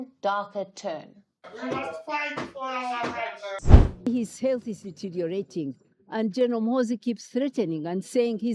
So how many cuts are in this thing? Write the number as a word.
one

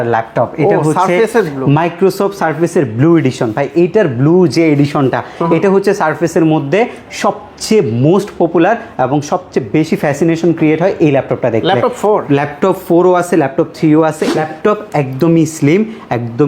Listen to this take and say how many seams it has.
one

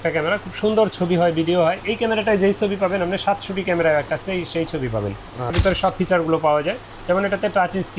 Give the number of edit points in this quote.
one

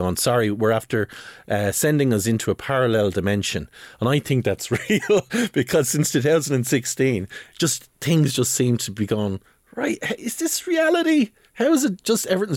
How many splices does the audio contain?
zero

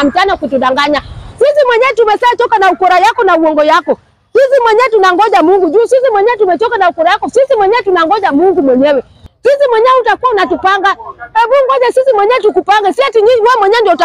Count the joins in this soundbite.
one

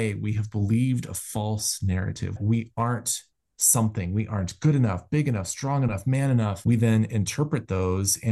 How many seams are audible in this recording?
two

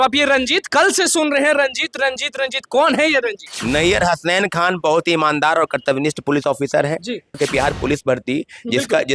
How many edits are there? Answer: two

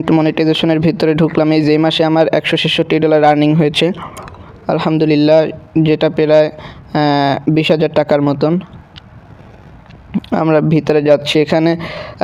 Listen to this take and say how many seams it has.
zero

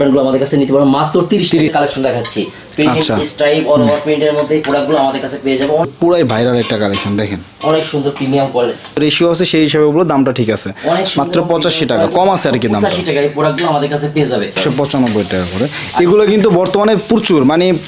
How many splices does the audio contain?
four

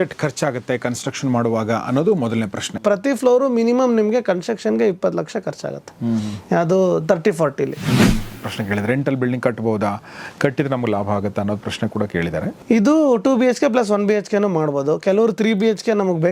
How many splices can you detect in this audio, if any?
three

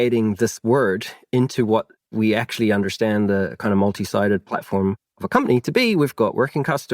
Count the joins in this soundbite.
one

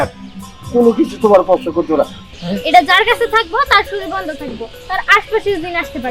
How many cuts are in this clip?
one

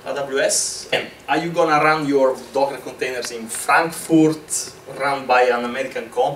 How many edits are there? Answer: one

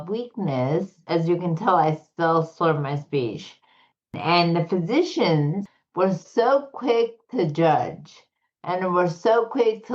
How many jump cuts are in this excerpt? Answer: three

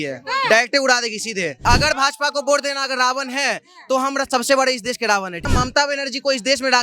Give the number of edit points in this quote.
two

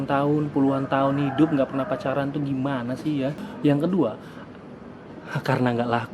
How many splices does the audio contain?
one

